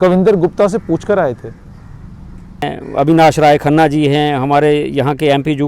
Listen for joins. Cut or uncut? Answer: cut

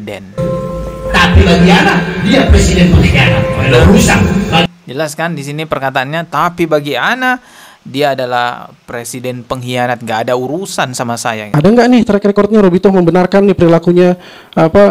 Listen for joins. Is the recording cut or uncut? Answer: cut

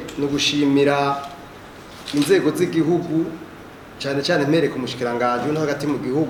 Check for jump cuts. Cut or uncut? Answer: uncut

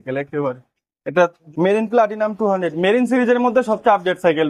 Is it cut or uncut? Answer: cut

